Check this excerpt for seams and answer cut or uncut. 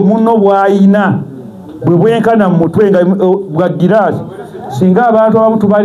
uncut